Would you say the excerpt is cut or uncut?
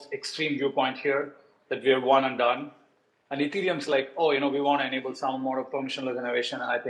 uncut